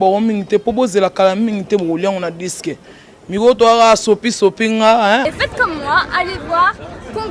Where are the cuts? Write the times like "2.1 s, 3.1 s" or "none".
5.2 s